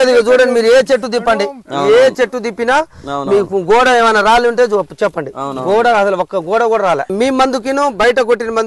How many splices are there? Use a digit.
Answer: 1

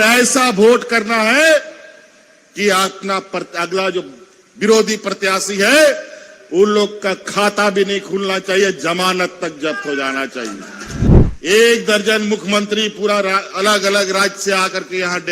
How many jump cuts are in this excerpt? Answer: 1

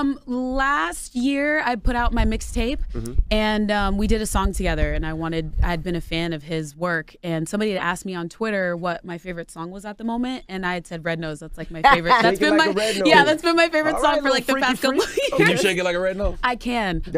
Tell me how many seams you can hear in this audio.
0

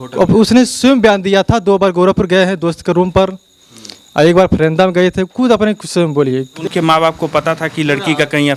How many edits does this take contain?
1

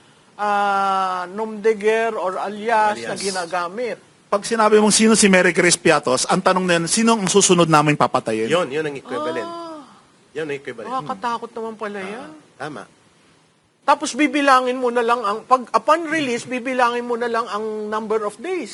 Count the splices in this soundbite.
0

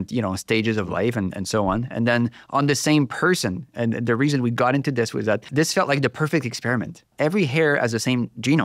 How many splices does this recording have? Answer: 2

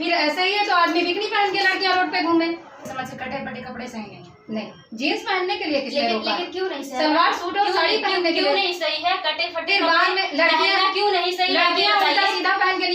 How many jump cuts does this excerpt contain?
1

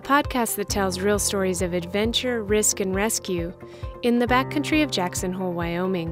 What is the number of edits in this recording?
0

